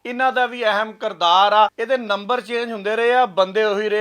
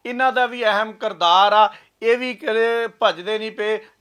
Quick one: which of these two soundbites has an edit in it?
first; 1 cut; at 1.8 s

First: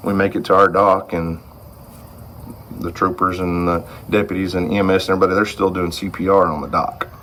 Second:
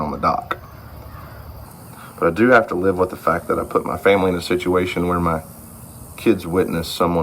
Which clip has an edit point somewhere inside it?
second; 1 cut; at 1.7 s

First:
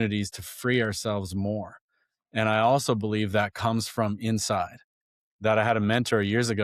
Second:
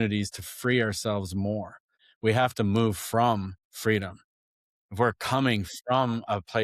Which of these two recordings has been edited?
second; 2 cuts; at 2.0 s, 3.6 s

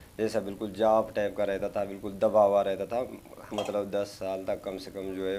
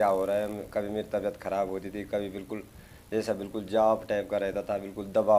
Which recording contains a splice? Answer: first; 1 cut; at 3.5 s

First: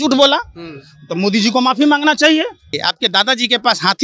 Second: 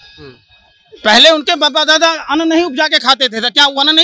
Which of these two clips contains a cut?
first; 1 cut; at 2.8 s

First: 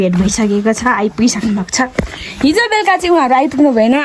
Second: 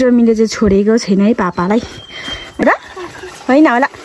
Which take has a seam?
second; 1 cut; at 2.6 s

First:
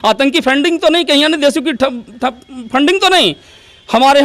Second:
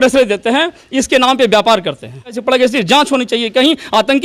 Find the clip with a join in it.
second; 1 cut; at 2.4 s

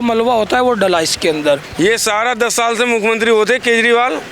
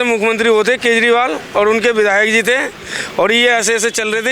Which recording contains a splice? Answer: first; 1 cut; at 1.7 s

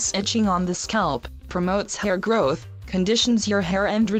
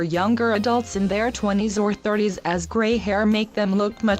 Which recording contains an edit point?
second; 1 cut; at 2.9 s

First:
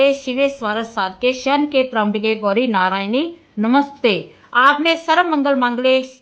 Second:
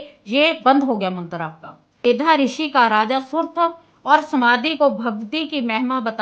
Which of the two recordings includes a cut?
second; 1 cut; at 2.0 s

